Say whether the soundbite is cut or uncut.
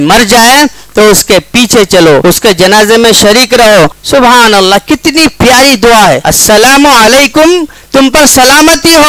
cut